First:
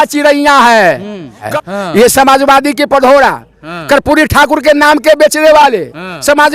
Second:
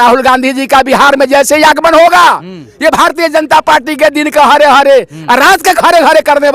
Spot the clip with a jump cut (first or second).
first